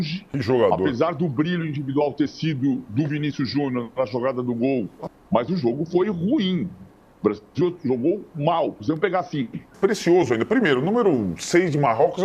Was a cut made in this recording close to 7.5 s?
no; 2 cuts; at 5.0 s, 9.7 s

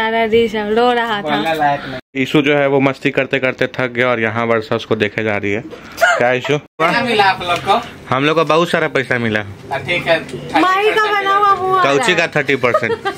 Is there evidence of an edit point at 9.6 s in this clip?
no; 2 cuts; at 2.0 s, 6.7 s

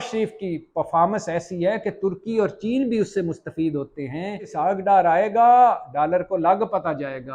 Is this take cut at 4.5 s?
yes; 1 cut; at 4.5 s

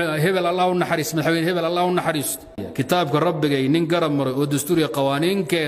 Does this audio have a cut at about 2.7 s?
yes; 1 cut; at 2.7 s

